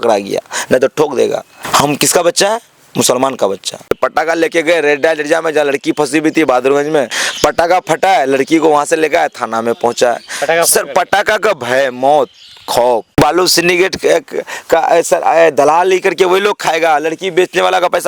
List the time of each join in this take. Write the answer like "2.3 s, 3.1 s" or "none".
1.6 s, 3.9 s, 7.2 s, 13.2 s